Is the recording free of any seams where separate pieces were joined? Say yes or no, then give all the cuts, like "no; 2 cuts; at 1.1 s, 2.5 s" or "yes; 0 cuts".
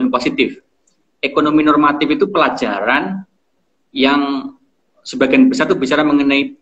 yes; 0 cuts